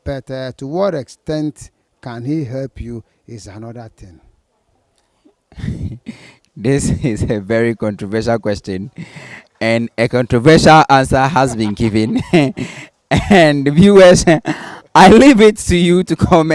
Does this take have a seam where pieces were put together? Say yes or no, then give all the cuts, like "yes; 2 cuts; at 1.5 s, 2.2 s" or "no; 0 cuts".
no; 0 cuts